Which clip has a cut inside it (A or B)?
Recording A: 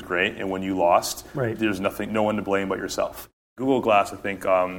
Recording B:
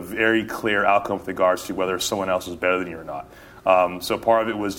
A